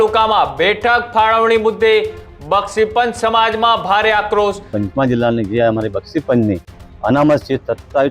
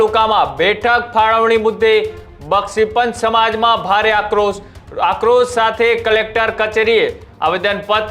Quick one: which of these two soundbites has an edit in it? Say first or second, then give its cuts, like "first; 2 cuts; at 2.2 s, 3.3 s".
first; 1 cut; at 4.8 s